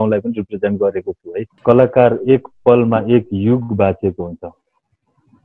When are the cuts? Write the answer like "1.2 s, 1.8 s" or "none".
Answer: 1.5 s